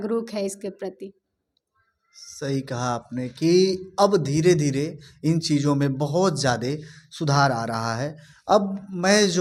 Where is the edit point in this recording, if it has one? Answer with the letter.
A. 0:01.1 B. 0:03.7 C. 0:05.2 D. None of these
D